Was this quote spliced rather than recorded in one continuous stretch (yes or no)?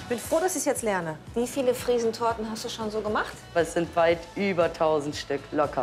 yes